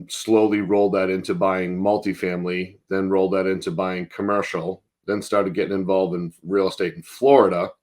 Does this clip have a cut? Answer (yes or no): no